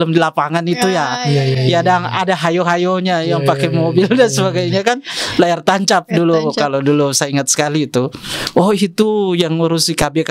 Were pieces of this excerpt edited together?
no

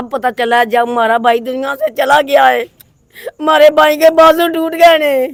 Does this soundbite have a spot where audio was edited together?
no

